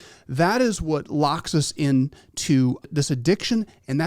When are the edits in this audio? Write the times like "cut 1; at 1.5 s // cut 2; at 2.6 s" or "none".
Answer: cut 1; at 2.9 s